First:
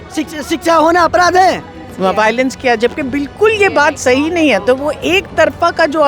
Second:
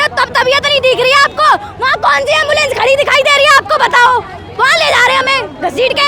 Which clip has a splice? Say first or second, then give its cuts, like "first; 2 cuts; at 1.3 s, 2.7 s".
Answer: first; 1 cut; at 1.9 s